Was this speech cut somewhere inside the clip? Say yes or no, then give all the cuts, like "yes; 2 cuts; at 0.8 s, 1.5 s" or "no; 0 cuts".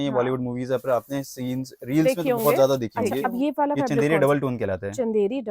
yes; 1 cut; at 3.3 s